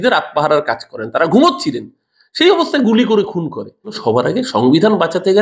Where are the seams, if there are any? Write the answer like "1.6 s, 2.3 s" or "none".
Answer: 4.0 s